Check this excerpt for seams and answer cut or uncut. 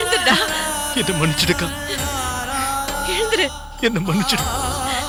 uncut